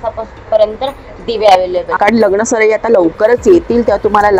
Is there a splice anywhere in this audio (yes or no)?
yes